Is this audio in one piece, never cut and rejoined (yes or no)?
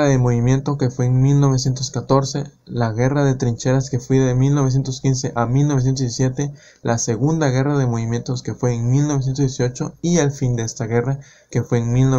yes